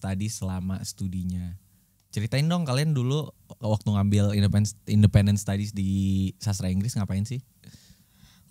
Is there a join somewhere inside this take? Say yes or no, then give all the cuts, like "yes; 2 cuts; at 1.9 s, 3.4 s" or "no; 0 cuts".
no; 0 cuts